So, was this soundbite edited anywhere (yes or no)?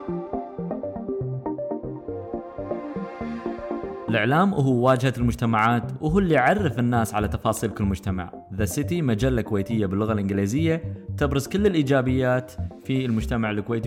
yes